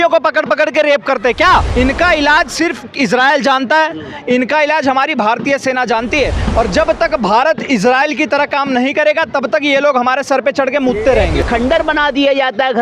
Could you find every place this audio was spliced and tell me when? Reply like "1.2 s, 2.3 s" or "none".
1.7 s, 11.4 s